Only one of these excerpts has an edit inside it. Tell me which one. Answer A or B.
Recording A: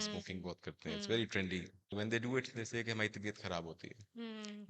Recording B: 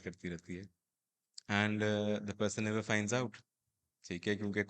A